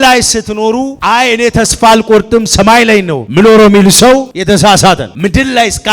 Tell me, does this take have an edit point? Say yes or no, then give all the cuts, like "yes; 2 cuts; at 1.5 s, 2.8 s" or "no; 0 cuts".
yes; 4 cuts; at 0.9 s, 3.2 s, 4.3 s, 5.1 s